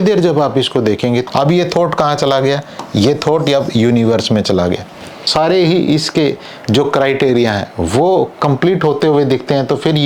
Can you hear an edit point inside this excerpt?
yes; 2 cuts; at 1.3 s, 5.2 s

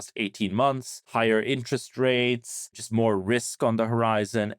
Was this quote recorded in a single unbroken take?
no; 2 cuts; at 1.1 s, 2.8 s

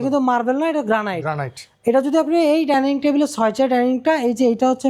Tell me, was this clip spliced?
no; 0 cuts

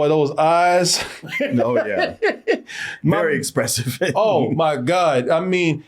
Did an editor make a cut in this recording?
yes; 1 cut; at 1.3 s

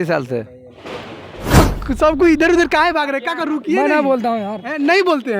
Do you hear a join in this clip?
yes; 1 cut; at 1.6 s

